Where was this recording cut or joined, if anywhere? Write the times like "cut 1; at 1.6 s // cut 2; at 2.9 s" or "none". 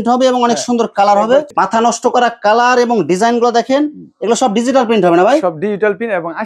cut 1; at 1.5 s